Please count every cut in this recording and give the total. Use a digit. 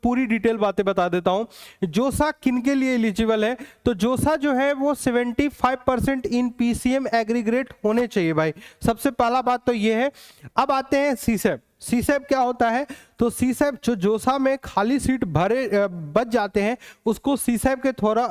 1